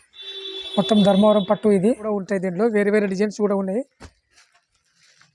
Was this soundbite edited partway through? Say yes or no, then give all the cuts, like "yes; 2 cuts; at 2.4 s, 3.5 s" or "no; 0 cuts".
yes; 1 cut; at 2.1 s